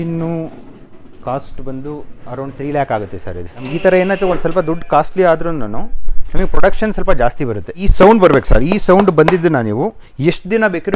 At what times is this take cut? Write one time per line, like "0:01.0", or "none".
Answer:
0:03.6
0:07.9